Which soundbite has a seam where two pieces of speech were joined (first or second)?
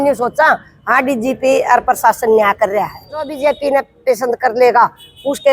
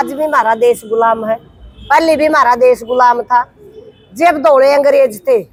first